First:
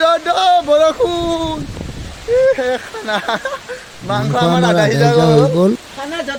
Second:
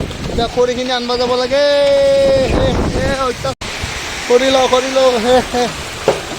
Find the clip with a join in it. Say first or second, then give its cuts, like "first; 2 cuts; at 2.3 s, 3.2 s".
second; 1 cut; at 3.6 s